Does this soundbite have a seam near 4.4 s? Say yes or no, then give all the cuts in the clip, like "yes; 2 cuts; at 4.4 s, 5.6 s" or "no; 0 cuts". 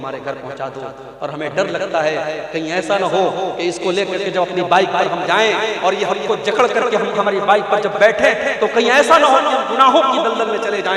no; 0 cuts